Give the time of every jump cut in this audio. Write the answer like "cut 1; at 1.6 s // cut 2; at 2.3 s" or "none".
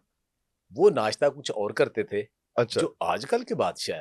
none